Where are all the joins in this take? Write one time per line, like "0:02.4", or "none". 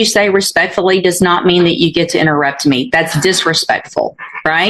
none